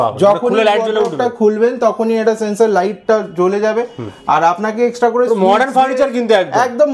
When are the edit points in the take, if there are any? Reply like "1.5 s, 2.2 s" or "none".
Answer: none